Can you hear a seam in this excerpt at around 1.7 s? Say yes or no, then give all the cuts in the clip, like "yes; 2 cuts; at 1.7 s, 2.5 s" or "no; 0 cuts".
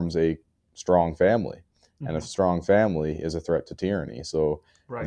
no; 0 cuts